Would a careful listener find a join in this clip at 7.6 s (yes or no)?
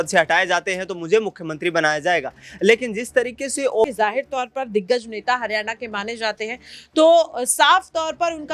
no